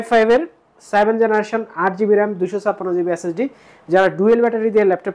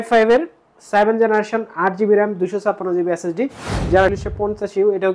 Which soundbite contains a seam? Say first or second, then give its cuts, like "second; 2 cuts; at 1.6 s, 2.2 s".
second; 1 cut; at 4.1 s